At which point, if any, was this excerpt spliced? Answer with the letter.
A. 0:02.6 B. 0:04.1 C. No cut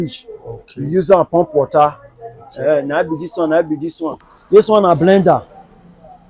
B